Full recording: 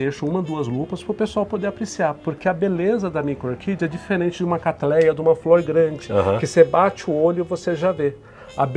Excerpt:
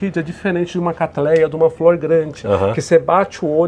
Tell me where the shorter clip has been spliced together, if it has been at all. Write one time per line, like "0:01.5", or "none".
none